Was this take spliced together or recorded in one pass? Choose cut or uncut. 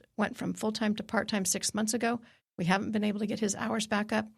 uncut